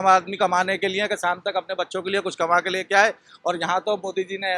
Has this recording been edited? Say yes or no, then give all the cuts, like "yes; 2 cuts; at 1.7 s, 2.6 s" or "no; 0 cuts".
no; 0 cuts